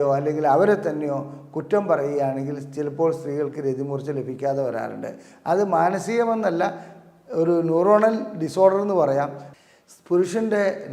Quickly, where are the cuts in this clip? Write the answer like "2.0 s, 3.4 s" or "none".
9.4 s

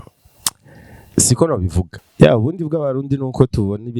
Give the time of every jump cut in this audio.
1.9 s

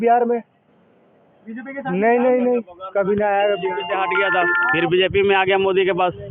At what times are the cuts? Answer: none

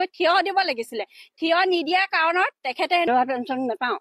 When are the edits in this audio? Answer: 3.1 s

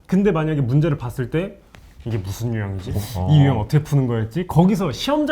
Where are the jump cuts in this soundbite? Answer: 2.9 s

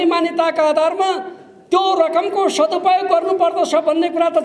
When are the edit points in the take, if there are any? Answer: none

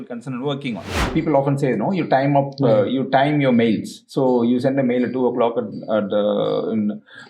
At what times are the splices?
1.1 s

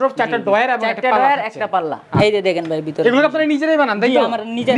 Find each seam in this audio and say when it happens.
2.1 s

